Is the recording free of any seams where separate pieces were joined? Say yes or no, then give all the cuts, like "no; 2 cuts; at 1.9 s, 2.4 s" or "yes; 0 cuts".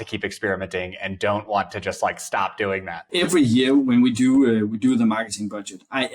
no; 1 cut; at 3.1 s